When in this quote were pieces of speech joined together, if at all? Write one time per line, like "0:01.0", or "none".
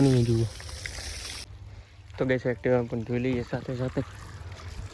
0:01.4

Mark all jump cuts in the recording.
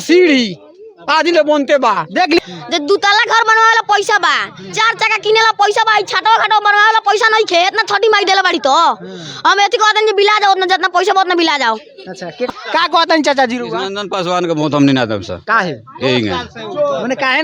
0:02.4
0:12.5

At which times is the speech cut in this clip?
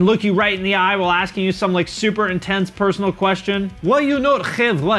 none

